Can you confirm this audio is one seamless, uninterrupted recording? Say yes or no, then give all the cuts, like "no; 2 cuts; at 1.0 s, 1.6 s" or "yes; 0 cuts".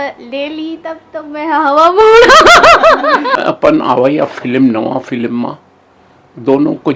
no; 1 cut; at 3.4 s